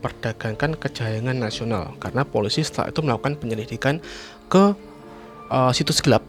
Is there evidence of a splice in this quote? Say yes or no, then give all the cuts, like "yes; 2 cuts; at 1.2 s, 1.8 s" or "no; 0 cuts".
no; 0 cuts